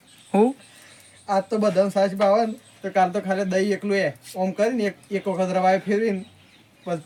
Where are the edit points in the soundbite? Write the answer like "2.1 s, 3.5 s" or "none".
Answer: none